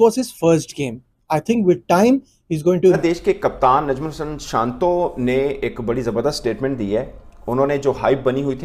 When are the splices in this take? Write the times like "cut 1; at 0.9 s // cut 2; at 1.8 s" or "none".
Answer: none